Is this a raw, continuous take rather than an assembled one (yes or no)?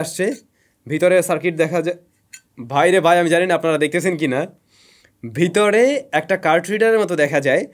yes